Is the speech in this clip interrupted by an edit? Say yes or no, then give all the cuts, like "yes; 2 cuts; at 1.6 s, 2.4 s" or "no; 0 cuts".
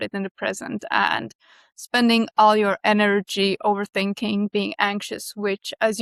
no; 0 cuts